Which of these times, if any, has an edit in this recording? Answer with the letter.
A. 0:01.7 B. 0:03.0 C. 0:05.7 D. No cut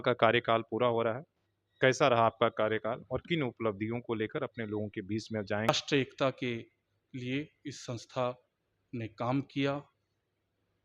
C